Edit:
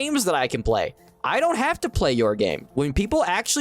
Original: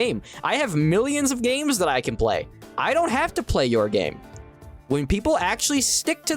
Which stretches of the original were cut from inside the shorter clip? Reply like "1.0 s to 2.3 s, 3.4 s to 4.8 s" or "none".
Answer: 4.2 s to 4.8 s